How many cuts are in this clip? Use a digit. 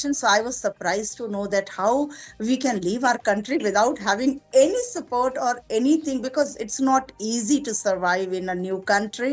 0